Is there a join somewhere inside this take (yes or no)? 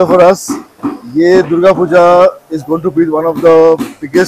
no